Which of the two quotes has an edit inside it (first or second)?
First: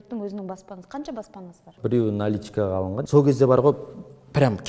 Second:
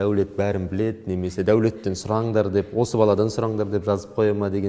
first